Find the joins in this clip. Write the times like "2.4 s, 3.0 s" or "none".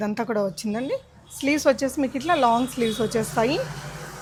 none